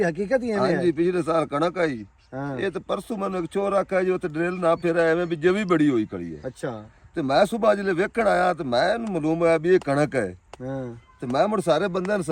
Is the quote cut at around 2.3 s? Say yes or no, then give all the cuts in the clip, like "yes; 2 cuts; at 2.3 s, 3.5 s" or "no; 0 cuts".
no; 0 cuts